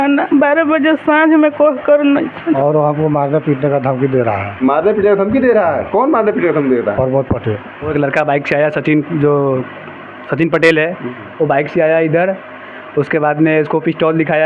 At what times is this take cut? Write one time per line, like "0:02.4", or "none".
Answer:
0:02.6
0:07.7